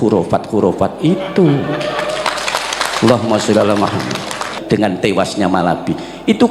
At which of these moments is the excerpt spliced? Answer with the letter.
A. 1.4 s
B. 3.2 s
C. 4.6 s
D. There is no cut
C